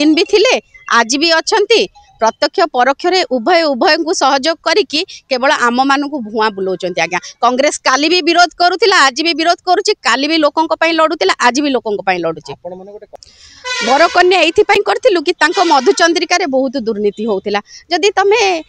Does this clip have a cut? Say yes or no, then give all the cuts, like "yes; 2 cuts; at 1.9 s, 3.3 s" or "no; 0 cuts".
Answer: no; 0 cuts